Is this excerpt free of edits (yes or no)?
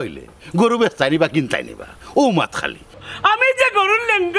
no